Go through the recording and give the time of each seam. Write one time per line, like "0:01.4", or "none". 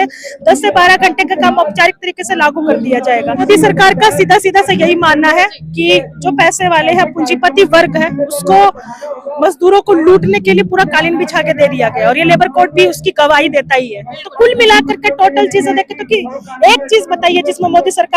0:03.4
0:14.2